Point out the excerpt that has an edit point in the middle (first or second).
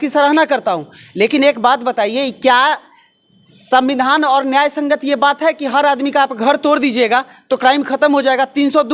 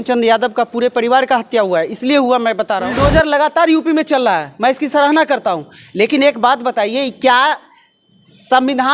second